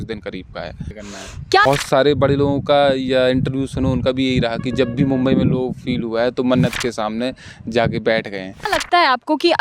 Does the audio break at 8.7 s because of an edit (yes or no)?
yes